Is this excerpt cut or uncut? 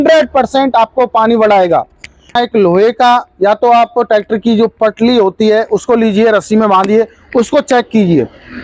cut